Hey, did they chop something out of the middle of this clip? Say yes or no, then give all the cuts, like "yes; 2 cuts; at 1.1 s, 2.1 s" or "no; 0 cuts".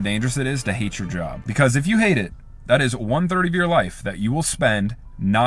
no; 0 cuts